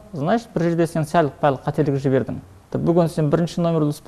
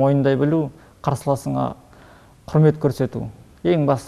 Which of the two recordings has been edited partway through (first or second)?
first